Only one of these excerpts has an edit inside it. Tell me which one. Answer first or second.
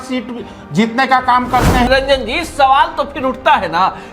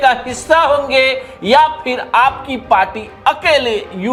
first